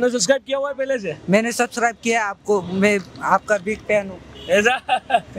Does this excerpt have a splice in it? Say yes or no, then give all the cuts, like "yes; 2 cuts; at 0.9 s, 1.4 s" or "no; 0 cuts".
no; 0 cuts